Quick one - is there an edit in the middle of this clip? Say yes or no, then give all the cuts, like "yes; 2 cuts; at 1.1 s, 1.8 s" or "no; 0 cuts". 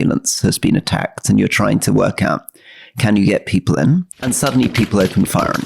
yes; 1 cut; at 4.1 s